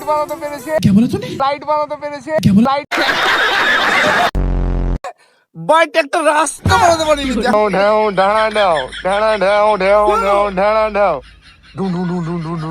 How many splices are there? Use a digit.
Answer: 2